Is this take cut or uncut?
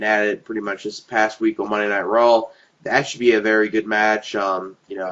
cut